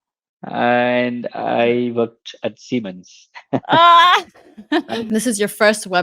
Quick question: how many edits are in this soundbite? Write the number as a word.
one